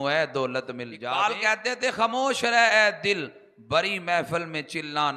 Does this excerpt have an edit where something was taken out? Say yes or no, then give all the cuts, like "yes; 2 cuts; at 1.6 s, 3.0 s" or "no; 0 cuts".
yes; 1 cut; at 0.9 s